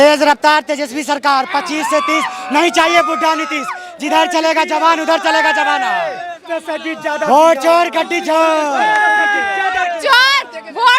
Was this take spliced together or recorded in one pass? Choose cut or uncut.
uncut